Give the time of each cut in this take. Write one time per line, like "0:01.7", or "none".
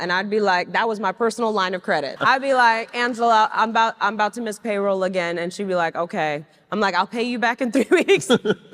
0:02.1